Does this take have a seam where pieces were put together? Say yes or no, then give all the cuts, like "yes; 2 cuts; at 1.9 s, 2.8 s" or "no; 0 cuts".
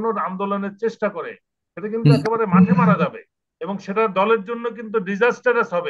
no; 0 cuts